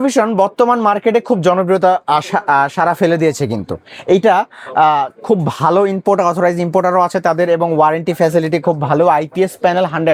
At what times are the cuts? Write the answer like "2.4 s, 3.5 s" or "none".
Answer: none

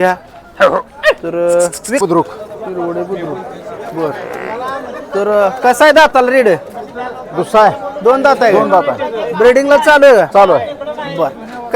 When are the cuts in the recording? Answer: 2.0 s

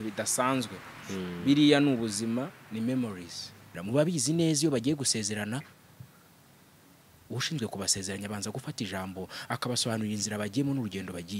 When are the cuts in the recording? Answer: 3.7 s

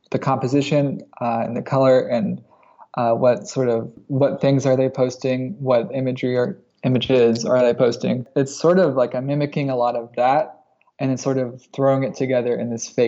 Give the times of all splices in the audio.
none

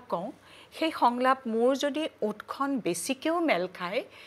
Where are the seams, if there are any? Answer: none

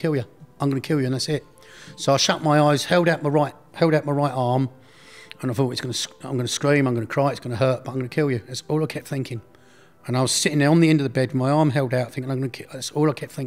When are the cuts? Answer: none

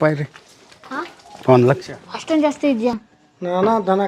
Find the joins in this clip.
3.0 s

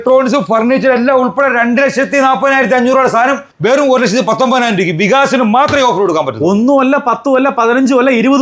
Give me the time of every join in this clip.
none

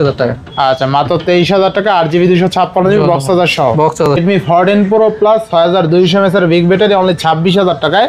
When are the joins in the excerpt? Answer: 4.2 s

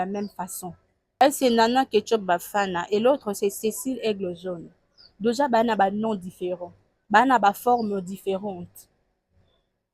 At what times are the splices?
1.2 s

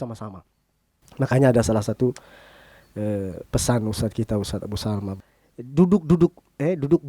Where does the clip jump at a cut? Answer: 5.2 s

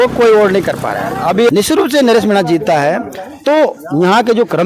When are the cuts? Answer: 1.5 s

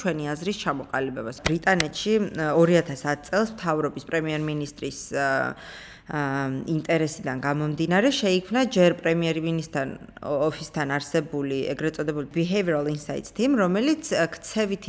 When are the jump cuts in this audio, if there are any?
1.4 s, 12.3 s

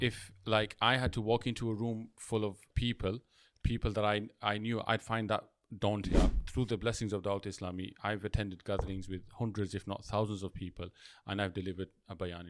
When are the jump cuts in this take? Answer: 2.7 s, 6.1 s

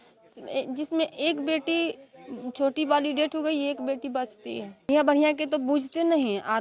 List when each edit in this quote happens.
4.9 s

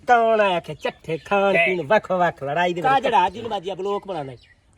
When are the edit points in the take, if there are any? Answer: 2.8 s

